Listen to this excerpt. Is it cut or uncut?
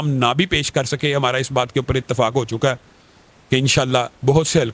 uncut